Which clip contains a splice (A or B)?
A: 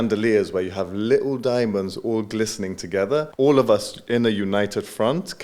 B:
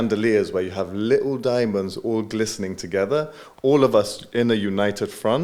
A